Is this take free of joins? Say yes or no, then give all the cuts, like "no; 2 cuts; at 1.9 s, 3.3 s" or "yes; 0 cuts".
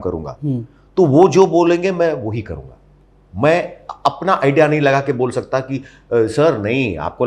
yes; 0 cuts